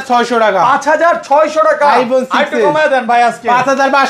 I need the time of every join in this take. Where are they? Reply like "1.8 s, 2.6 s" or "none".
none